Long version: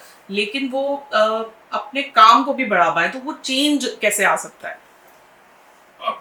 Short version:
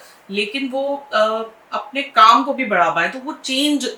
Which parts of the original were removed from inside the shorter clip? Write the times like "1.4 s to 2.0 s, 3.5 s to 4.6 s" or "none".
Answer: none